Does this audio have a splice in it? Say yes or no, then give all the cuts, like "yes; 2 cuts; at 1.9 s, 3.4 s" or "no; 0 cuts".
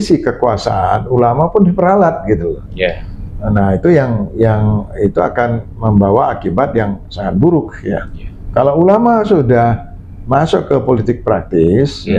no; 0 cuts